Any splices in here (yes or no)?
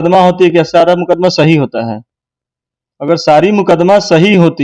no